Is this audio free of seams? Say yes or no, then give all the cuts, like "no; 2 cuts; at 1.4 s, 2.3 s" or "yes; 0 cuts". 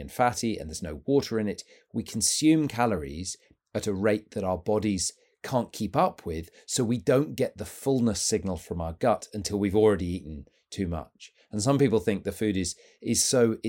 yes; 0 cuts